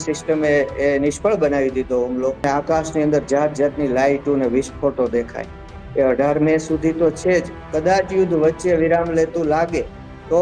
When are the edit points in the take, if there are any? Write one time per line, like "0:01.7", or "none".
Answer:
0:02.4
0:07.6